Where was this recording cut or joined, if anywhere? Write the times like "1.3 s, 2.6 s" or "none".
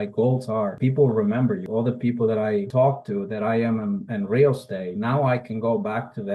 0.8 s, 1.6 s, 2.7 s